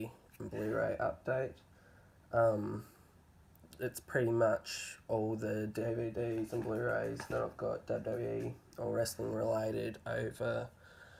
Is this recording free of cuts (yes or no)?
yes